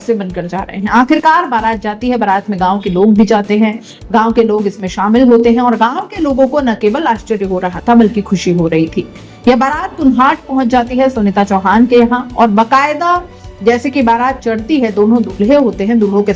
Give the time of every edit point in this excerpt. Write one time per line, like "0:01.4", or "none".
none